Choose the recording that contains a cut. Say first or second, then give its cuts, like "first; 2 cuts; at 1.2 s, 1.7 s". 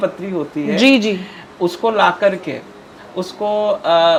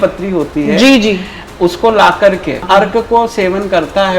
second; 1 cut; at 2.6 s